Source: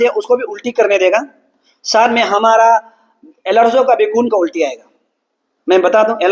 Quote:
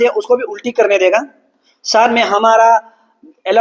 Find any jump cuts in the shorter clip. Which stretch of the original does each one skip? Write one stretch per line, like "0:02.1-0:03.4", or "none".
none